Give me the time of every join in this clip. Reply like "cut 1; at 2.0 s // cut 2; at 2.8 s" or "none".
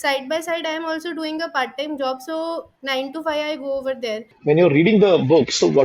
cut 1; at 4.3 s